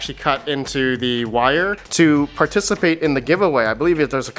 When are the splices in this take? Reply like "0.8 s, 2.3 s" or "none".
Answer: 1.8 s